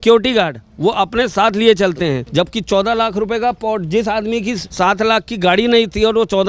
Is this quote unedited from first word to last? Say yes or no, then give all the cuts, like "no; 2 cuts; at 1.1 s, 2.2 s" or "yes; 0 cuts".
no; 2 cuts; at 2.2 s, 4.7 s